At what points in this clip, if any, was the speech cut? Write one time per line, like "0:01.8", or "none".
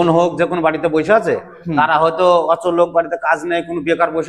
none